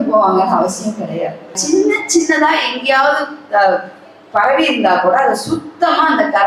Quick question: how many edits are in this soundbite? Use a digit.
1